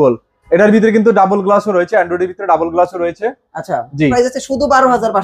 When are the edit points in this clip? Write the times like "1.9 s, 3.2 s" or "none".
4.1 s